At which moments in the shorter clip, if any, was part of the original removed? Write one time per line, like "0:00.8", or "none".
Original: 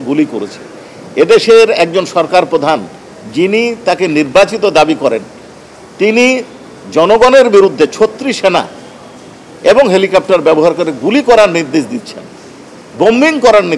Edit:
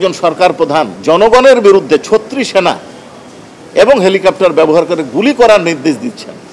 0:00.9